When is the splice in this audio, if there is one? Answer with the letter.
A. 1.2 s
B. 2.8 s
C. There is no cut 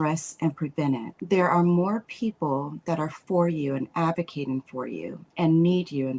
A